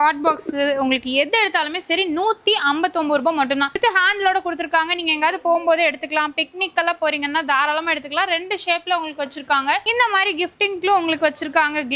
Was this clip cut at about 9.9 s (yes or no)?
yes